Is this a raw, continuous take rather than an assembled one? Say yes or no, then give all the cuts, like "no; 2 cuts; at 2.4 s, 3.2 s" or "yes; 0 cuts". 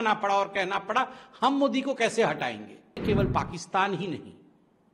no; 1 cut; at 3.0 s